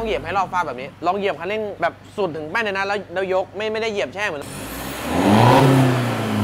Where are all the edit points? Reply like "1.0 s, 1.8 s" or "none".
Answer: 0.8 s, 1.7 s, 4.4 s

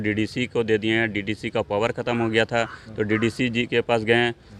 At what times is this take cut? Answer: none

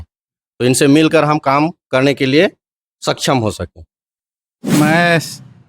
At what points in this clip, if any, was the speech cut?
4.0 s

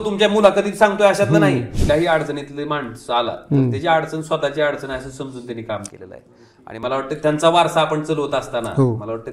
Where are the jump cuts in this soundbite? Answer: 1.7 s

